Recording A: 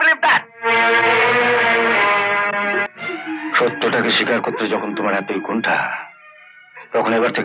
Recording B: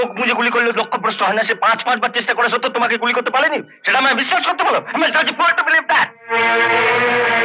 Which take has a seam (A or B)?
A